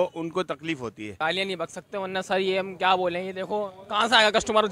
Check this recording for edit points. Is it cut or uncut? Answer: cut